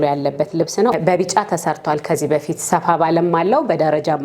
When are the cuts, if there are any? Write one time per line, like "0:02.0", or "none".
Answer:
0:01.1